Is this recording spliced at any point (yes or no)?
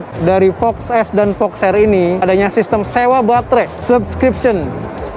no